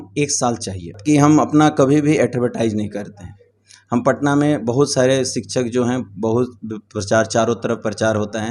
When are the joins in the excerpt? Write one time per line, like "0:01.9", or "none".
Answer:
0:00.9